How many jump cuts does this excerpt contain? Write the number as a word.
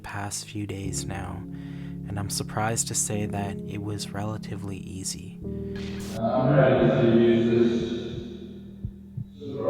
one